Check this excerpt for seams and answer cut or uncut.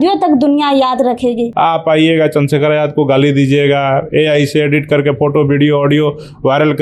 cut